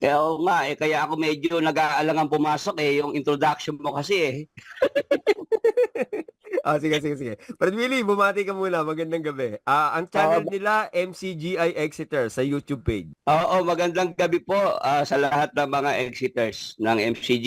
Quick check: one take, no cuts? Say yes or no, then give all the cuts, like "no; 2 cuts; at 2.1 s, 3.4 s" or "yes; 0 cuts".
no; 1 cut; at 13.1 s